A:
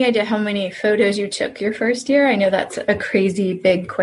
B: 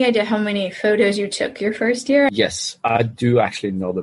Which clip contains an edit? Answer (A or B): B